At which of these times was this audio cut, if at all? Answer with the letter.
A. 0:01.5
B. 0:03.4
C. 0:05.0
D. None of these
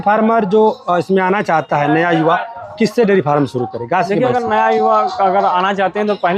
D